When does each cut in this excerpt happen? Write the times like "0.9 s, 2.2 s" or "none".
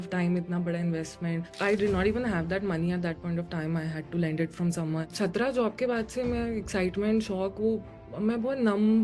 1.5 s, 5.1 s